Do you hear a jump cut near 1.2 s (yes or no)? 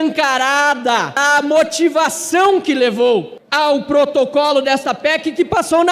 yes